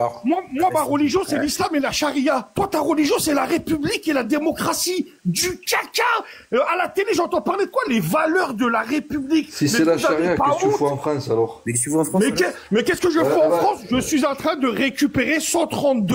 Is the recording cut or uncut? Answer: uncut